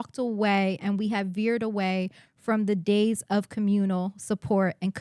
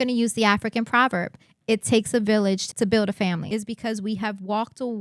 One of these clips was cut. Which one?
second; 2 cuts; at 2.6 s, 3.4 s

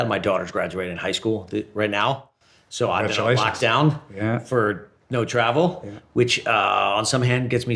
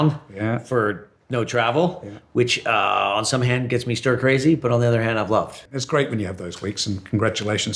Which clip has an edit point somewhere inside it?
second; 1 cut; at 5.8 s

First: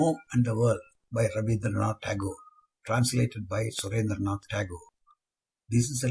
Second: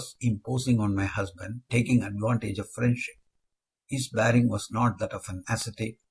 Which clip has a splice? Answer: first; 1 cut; at 0.9 s

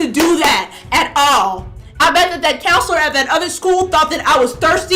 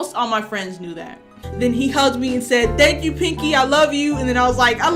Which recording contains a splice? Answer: second; 1 cut; at 1.4 s

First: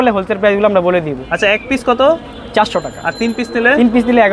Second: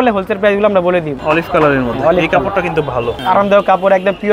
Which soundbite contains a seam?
second; 2 cuts; at 1.1 s, 3.2 s

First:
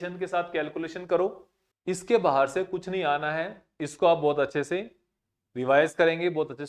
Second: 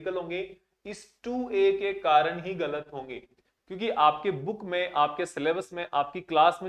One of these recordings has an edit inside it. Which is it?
first; 1 cut; at 1.7 s

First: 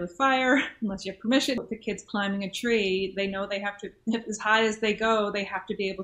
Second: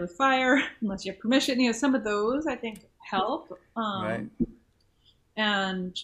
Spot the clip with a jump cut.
first; 1 cut; at 1.6 s

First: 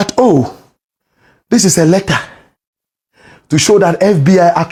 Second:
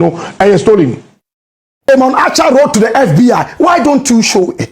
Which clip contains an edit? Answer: second; 1 cut; at 1.9 s

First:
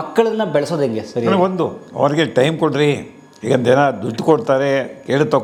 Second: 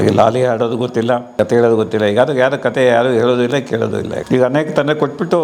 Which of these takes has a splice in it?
second; 2 cuts; at 1.3 s, 4.1 s

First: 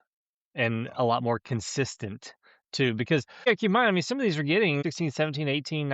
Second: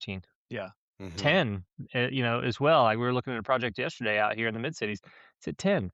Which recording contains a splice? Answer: first; 2 cuts; at 3.5 s, 4.8 s

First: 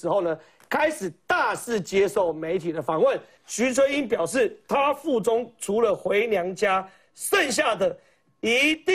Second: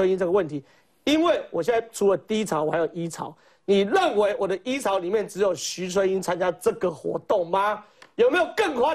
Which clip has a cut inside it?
first; 1 cut; at 3.3 s

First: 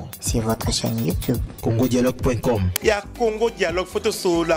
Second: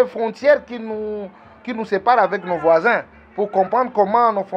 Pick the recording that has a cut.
first; 1 cut; at 2.7 s

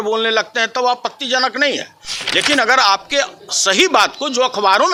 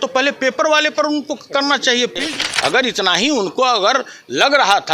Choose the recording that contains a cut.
second; 1 cut; at 2.3 s

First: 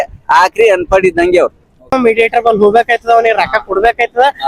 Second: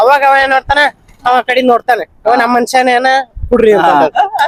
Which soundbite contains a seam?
first; 1 cut; at 1.7 s

